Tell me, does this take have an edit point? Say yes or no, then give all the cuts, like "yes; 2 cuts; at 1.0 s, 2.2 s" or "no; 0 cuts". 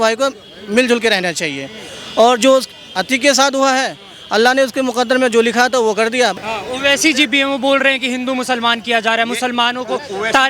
yes; 1 cut; at 6.3 s